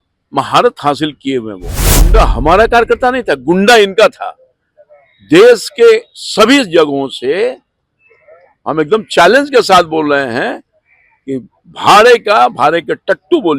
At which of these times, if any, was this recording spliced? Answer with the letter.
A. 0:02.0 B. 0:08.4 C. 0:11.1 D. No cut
A